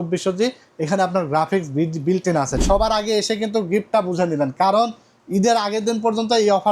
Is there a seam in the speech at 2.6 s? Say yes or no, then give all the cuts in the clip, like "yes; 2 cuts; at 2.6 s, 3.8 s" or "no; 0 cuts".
yes; 1 cut; at 2.6 s